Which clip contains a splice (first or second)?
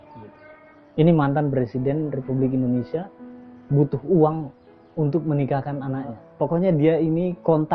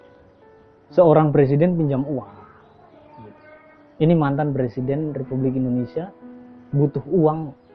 first